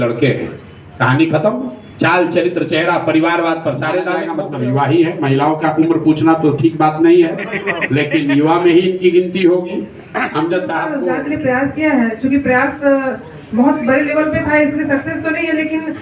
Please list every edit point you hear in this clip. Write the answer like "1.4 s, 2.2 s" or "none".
4.3 s, 11.1 s